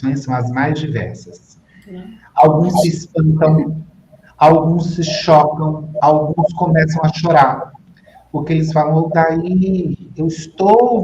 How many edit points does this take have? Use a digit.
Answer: 0